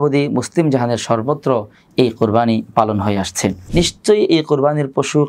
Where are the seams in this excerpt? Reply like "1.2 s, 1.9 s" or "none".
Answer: 3.6 s